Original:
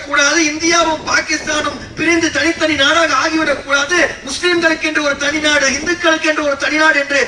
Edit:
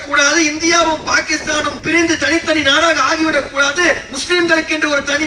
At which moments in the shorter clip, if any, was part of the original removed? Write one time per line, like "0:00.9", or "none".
0:01.8